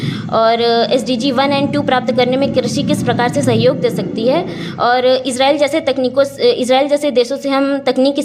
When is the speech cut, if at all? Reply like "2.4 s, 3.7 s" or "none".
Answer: none

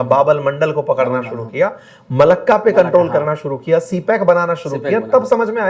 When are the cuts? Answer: none

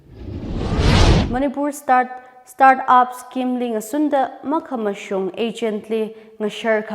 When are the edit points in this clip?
1.2 s

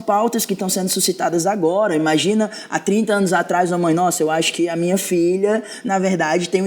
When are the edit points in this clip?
none

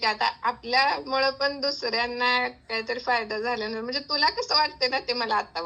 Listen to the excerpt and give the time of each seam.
none

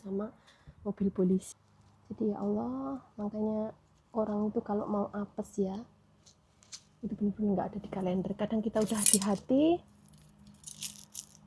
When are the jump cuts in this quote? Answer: 1.5 s

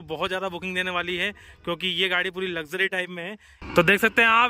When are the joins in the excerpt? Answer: 3.6 s

